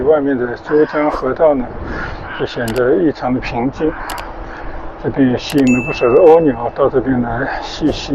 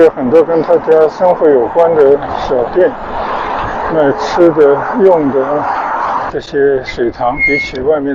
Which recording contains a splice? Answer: second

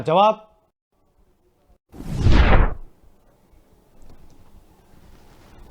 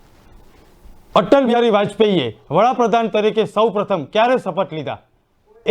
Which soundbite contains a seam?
second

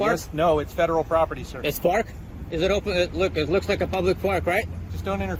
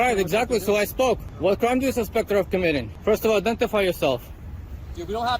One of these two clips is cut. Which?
second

